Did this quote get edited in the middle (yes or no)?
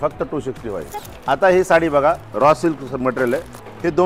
yes